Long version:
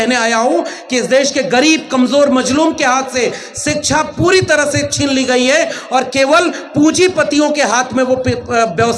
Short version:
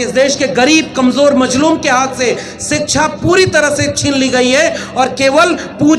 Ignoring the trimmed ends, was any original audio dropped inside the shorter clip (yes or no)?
no